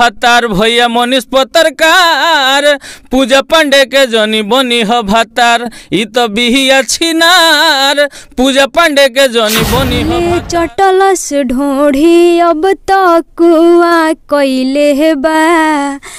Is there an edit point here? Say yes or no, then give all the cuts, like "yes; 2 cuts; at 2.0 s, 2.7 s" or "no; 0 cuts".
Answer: yes; 1 cut; at 10.0 s